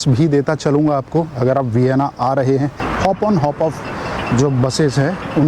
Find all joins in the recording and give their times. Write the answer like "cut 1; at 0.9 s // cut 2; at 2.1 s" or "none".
cut 1; at 2.9 s